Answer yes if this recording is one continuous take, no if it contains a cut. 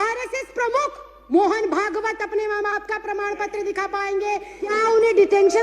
no